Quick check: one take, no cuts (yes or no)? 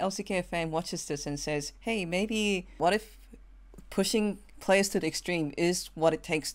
no